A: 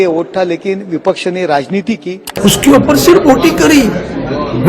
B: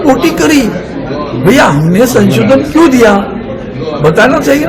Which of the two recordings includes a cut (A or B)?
A